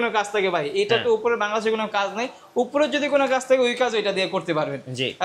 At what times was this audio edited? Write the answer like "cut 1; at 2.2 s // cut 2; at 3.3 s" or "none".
none